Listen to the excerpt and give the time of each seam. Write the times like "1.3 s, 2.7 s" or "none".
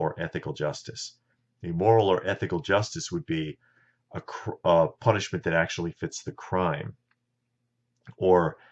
none